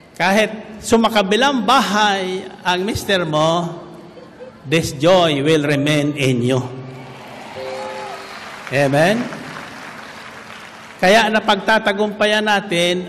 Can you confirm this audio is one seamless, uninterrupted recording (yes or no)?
yes